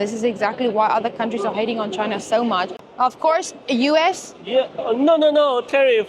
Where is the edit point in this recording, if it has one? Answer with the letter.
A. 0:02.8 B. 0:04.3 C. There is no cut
A